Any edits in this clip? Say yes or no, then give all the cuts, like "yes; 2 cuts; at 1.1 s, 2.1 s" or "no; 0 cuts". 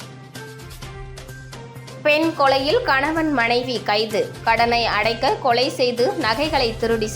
no; 0 cuts